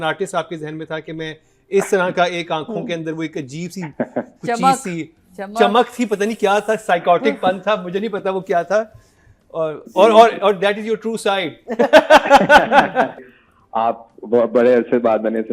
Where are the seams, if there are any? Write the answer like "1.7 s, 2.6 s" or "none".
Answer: 13.2 s